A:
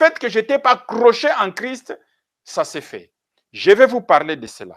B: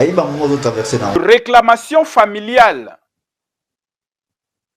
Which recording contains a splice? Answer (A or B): B